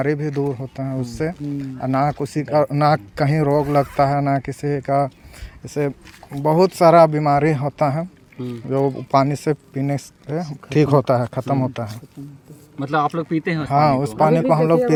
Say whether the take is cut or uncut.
uncut